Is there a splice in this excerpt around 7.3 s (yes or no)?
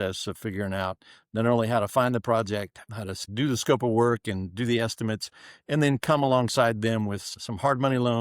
yes